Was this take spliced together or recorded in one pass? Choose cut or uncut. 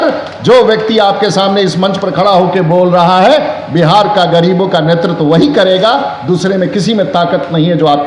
uncut